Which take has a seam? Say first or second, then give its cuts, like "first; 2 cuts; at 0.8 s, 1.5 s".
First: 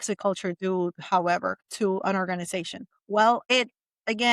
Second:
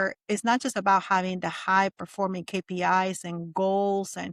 first; 2 cuts; at 1.6 s, 3.4 s